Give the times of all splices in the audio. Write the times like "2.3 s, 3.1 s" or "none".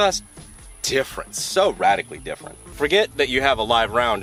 none